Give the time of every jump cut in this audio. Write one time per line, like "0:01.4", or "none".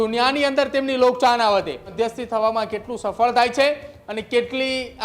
0:01.9